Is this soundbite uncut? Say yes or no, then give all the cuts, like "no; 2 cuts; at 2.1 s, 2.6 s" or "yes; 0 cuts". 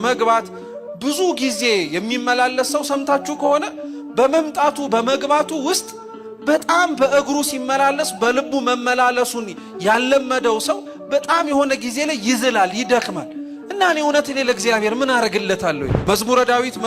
no; 1 cut; at 16.0 s